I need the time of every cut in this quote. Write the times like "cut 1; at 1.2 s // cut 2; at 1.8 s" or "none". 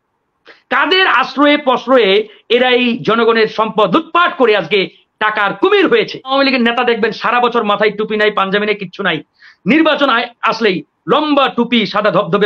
cut 1; at 6.3 s